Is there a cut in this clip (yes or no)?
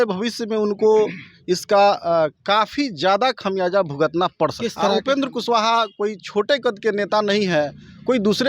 yes